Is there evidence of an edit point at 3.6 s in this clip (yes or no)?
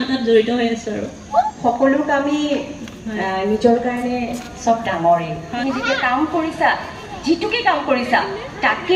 no